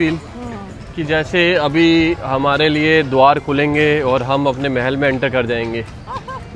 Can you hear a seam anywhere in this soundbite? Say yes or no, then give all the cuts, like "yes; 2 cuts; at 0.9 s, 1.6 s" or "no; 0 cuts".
no; 0 cuts